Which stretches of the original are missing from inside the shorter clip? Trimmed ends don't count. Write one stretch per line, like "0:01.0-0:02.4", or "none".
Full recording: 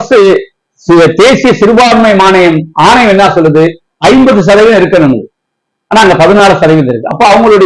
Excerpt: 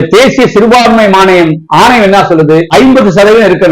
0:03.7-0:04.0